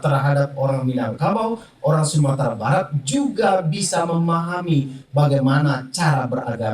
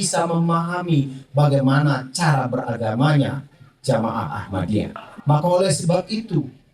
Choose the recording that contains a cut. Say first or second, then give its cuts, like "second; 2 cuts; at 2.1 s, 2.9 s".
second; 1 cut; at 5.1 s